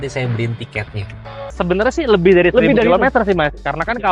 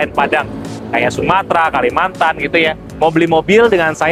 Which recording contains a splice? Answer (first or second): first